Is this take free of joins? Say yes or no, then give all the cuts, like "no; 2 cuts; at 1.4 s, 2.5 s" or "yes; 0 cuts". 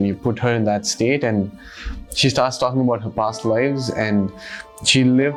yes; 0 cuts